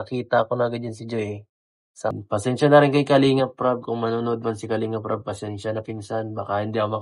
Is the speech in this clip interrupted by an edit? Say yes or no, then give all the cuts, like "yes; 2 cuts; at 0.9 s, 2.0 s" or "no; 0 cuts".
yes; 1 cut; at 2.2 s